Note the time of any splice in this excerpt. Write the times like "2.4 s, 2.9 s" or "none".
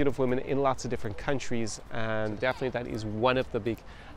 2.4 s